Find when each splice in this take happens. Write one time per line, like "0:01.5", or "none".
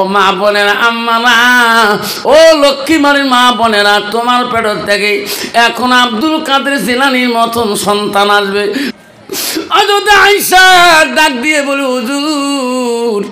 0:08.9

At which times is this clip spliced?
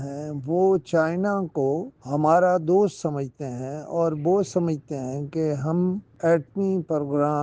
0:01.9
0:06.1

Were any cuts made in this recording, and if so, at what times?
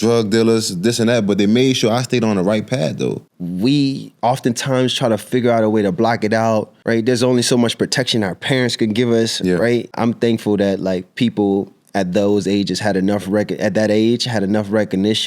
0:03.3
0:06.7
0:09.9

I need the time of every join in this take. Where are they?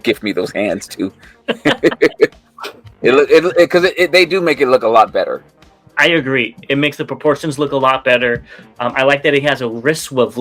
none

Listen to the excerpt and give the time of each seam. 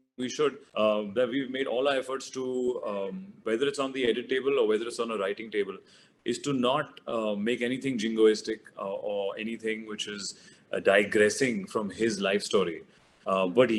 none

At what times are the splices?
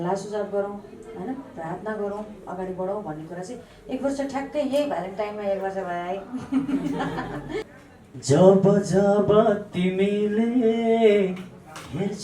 0:07.7

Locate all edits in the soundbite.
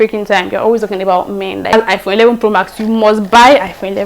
0:01.7

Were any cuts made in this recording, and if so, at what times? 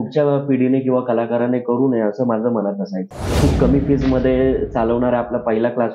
0:03.3

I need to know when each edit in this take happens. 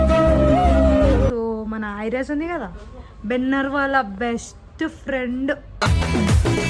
0:01.3

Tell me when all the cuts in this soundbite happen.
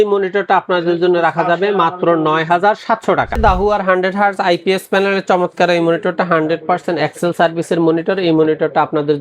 0:03.3

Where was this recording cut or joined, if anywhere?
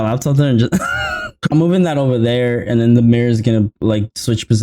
0:01.5

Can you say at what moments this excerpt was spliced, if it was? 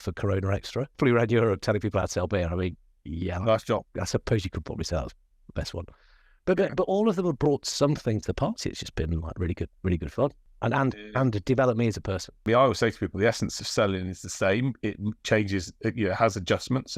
0:00.9
0:10.5
0:12.4

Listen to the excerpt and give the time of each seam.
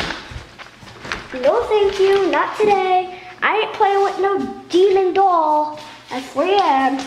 none

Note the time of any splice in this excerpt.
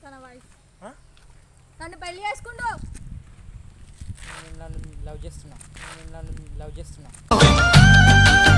none

